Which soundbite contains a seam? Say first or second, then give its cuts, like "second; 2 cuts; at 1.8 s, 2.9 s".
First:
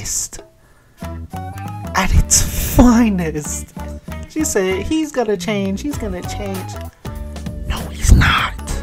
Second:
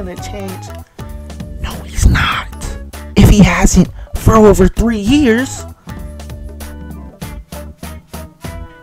second; 1 cut; at 5.5 s